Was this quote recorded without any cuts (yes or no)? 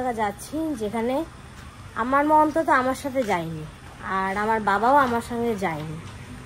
yes